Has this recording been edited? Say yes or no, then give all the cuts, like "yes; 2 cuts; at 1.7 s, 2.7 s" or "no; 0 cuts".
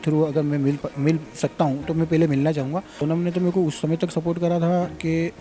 yes; 1 cut; at 2.9 s